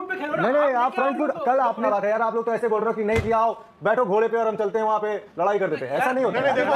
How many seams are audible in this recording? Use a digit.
1